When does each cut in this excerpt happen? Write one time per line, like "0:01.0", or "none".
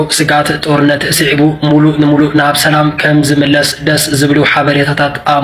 0:02.6